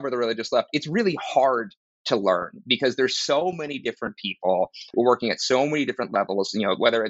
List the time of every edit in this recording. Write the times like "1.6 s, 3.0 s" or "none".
none